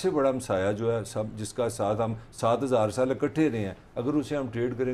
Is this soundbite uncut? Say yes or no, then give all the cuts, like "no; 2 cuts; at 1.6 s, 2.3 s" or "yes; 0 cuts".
yes; 0 cuts